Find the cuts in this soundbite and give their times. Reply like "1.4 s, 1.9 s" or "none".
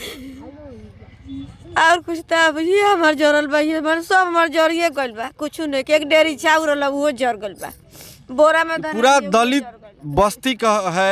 none

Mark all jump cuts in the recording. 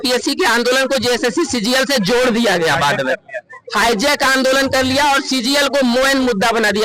none

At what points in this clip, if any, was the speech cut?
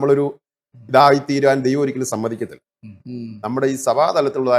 3.0 s

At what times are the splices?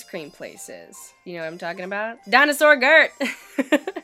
2.2 s

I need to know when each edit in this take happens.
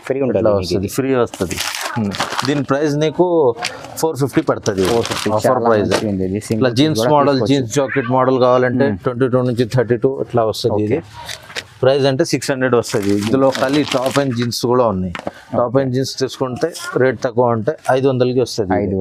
none

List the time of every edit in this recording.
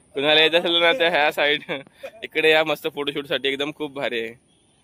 none

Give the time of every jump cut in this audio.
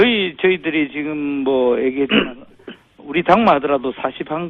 1.2 s

